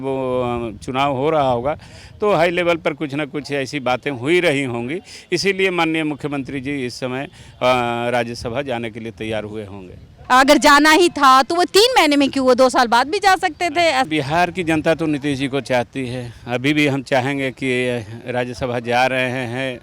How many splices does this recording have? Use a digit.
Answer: 2